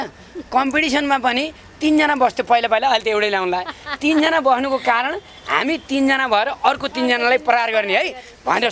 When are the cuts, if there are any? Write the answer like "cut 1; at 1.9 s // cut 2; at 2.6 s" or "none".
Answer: none